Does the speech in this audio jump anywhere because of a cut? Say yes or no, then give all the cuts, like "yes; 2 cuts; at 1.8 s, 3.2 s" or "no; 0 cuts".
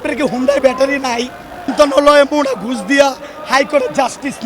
yes; 1 cut; at 1.7 s